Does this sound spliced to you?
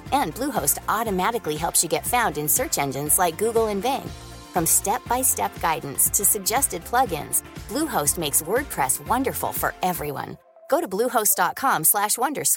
no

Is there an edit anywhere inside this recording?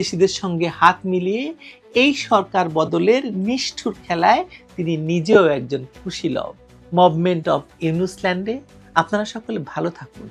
no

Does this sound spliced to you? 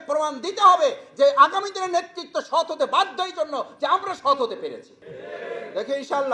no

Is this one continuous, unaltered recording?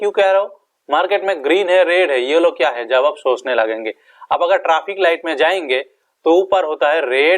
yes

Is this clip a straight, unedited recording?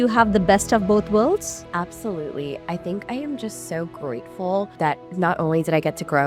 no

